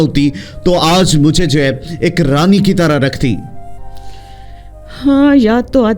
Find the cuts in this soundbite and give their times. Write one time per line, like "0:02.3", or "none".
none